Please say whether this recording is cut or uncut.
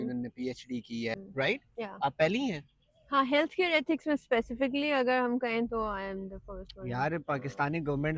uncut